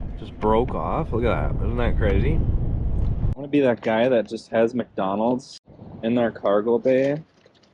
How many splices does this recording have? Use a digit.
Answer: 1